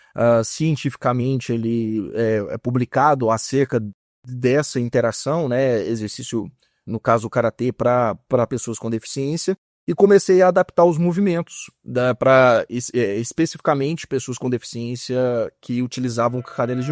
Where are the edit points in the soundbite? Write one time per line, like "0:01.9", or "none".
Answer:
none